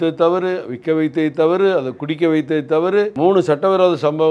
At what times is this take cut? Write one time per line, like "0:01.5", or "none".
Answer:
0:03.1